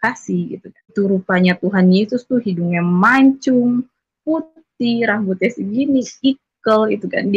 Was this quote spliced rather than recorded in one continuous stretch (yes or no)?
yes